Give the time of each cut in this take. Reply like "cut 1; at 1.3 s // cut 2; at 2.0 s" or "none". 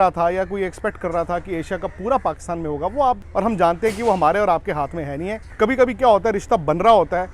cut 1; at 3.2 s // cut 2; at 5.5 s